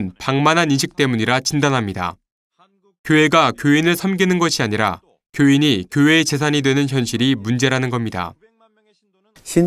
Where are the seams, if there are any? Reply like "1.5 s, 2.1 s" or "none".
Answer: 4.0 s